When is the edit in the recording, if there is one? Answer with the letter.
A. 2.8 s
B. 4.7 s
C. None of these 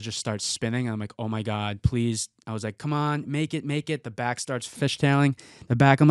B